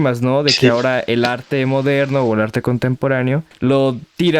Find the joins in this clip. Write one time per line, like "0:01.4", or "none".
0:03.5